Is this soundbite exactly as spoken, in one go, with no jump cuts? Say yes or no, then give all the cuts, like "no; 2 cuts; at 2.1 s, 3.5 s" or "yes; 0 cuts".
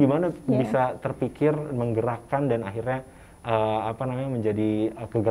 yes; 0 cuts